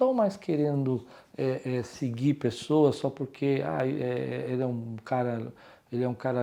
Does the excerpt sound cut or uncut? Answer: uncut